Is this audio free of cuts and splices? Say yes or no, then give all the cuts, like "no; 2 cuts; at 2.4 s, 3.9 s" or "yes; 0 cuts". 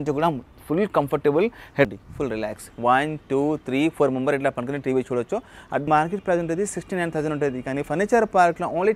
no; 2 cuts; at 1.9 s, 5.9 s